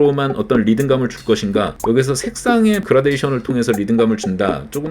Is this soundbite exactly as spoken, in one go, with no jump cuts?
no; 1 cut; at 1.8 s

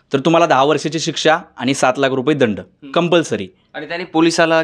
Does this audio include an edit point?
no; 0 cuts

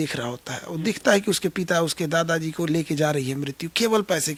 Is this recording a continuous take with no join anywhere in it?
yes; 0 cuts

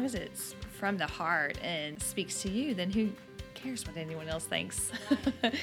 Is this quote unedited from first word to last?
no; 1 cut; at 2.0 s

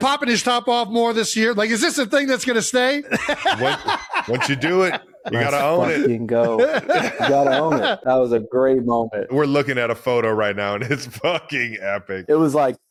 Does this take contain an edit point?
no; 0 cuts

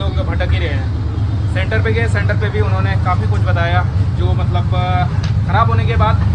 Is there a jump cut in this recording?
no; 0 cuts

